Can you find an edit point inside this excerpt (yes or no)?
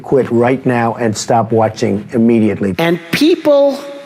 yes